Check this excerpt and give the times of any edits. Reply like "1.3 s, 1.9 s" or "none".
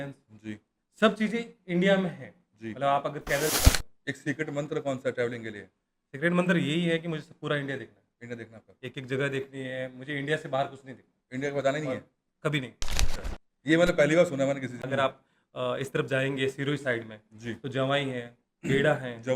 3.6 s, 14.7 s